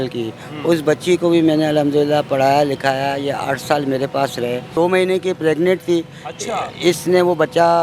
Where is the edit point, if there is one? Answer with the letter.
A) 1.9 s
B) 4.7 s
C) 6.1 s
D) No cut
B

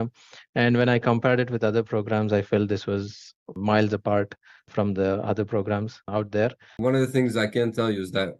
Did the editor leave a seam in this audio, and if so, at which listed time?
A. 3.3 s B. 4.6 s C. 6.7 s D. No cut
C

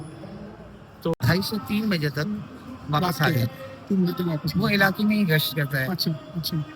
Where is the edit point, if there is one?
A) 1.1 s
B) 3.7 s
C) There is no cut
A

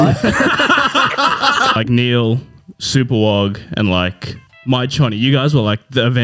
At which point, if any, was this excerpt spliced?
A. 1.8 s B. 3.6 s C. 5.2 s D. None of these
A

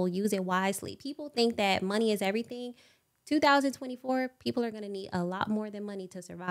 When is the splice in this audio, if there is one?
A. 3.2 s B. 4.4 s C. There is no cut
C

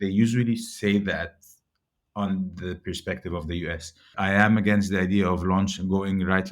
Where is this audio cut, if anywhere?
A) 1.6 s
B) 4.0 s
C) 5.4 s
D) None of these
B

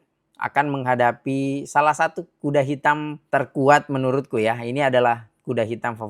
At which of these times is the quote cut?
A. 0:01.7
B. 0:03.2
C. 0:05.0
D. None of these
B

